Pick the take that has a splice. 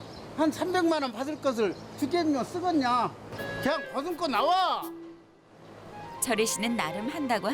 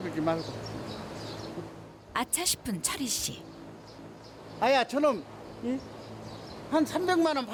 first; 1 cut; at 3.3 s

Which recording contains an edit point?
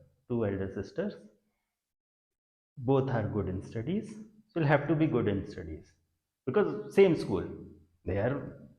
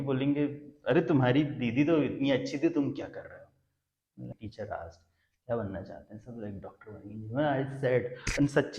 second; 1 cut; at 4.4 s

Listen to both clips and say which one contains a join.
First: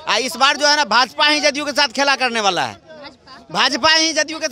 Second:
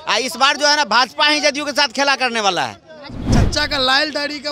second; 1 cut; at 3.1 s

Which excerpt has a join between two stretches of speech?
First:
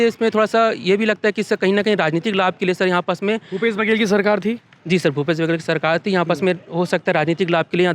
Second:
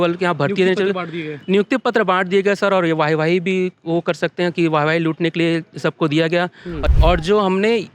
second; 1 cut; at 6.8 s

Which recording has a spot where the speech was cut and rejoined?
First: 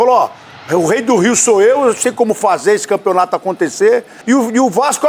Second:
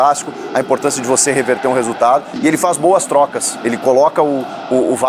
first; 1 cut; at 4.1 s

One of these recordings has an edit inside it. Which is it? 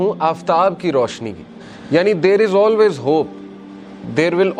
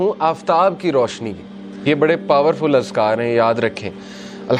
second; 1 cut; at 1.6 s

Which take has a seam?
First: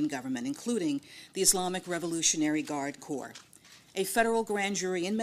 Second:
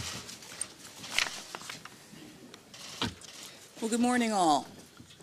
first; 1 cut; at 4.2 s

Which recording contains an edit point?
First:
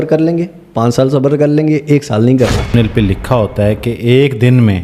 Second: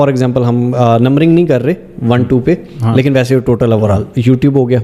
first; 1 cut; at 2.7 s

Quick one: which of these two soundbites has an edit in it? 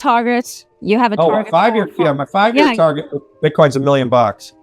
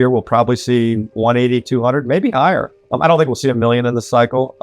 second; 1 cut; at 2.8 s

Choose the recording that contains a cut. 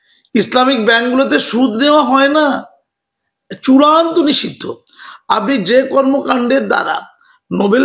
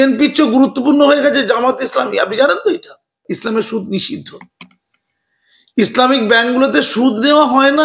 second; 1 cut; at 3.1 s

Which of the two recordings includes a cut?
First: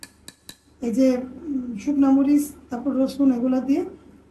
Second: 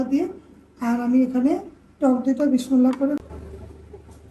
second; 1 cut; at 3.2 s

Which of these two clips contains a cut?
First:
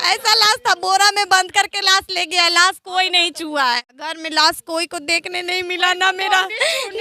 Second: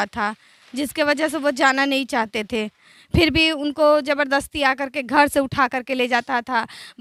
first; 1 cut; at 4.1 s

